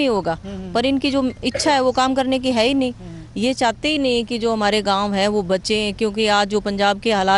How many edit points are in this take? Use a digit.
0